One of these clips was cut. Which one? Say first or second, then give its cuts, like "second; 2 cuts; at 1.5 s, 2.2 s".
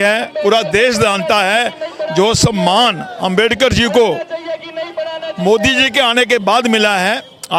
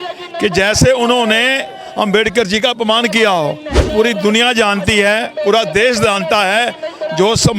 second; 1 cut; at 3.9 s